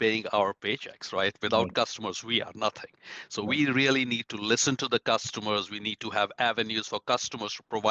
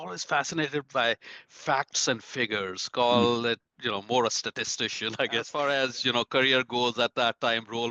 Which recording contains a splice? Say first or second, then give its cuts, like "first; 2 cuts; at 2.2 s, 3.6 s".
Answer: second; 1 cut; at 5.5 s